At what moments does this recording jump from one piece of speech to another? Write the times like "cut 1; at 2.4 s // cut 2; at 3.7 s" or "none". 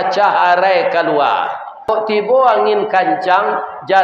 cut 1; at 1.9 s